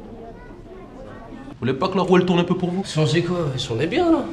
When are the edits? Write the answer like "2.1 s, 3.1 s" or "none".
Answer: 1.7 s